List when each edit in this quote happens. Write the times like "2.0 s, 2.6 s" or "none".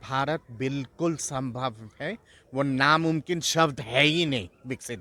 none